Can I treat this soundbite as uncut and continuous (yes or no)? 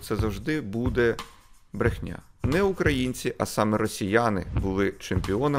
no